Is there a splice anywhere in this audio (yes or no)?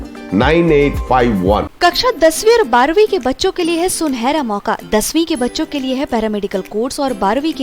yes